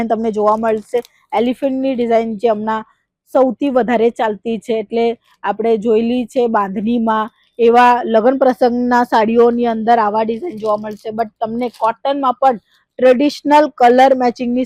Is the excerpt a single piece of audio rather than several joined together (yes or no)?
yes